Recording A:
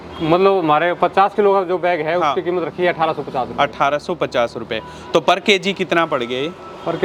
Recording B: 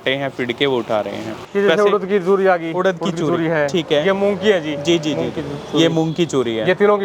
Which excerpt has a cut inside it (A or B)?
B